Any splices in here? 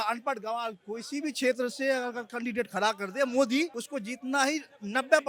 no; 0 cuts

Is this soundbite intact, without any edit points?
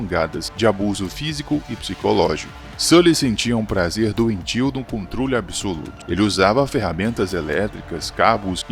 yes; 0 cuts

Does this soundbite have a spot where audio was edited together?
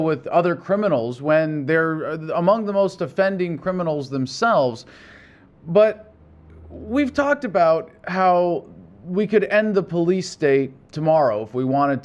no; 0 cuts

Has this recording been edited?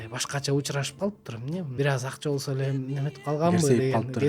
yes; 1 cut; at 1.7 s

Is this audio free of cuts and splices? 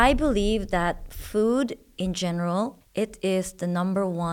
no; 1 cut; at 2.8 s

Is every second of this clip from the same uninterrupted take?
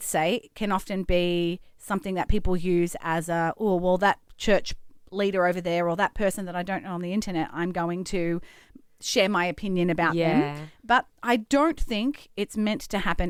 yes; 0 cuts

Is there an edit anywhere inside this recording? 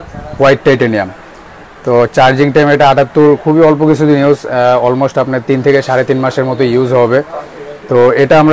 no; 0 cuts

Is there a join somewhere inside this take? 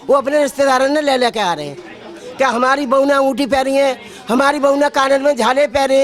no; 0 cuts

